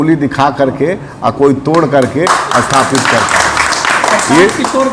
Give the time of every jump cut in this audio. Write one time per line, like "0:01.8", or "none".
none